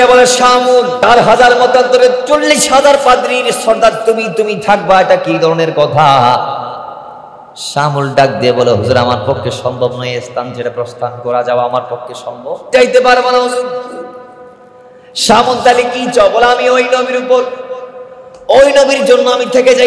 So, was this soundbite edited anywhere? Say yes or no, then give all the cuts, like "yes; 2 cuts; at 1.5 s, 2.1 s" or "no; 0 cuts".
yes; 2 cuts; at 1.0 s, 12.7 s